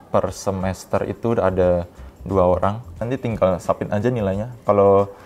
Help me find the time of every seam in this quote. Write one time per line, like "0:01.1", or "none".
0:03.0